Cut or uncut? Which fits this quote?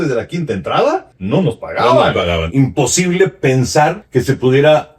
cut